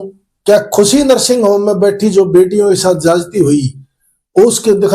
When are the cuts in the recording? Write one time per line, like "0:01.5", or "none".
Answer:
none